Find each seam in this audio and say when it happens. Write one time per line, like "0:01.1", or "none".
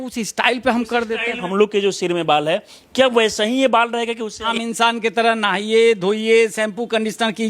0:01.4
0:04.4